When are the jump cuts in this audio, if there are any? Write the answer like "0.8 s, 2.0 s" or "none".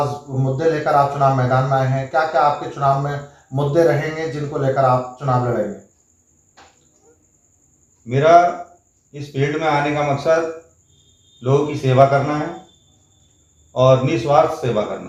none